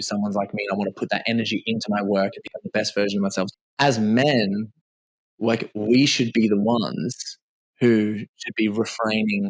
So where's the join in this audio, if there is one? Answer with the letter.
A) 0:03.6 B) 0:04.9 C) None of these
A